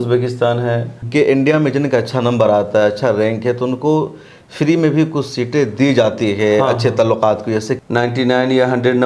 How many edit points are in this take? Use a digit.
2